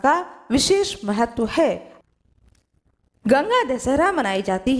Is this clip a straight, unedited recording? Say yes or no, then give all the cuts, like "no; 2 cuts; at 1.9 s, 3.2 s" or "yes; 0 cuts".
no; 1 cut; at 1.9 s